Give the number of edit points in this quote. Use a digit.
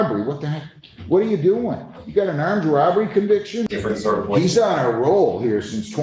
1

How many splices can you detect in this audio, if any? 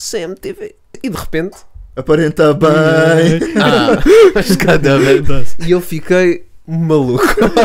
1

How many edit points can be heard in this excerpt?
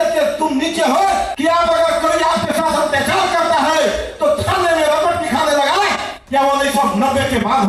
1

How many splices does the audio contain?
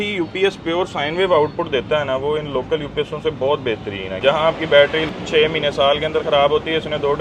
2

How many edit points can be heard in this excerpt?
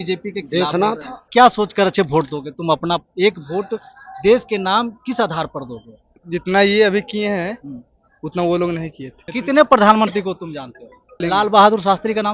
4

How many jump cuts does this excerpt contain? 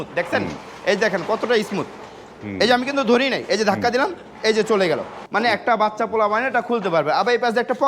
1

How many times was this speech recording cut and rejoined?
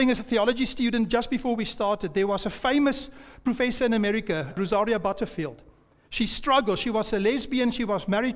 1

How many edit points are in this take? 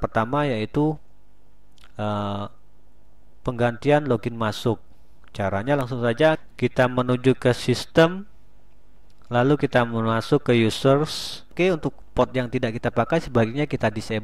2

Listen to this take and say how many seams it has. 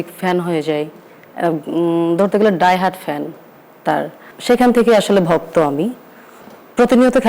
1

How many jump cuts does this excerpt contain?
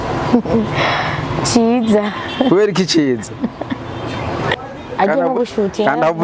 1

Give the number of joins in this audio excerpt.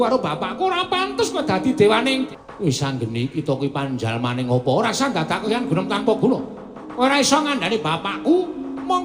1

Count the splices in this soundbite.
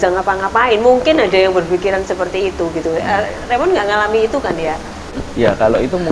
1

